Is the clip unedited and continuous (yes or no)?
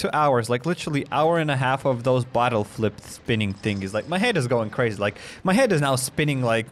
yes